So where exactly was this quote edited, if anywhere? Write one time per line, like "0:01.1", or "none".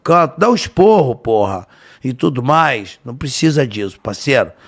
none